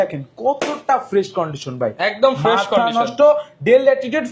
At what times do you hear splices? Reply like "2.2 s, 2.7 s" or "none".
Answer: none